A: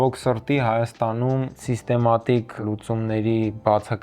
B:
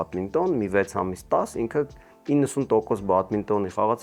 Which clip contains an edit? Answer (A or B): A